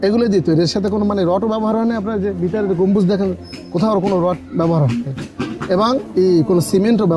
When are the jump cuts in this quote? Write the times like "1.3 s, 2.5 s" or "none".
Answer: none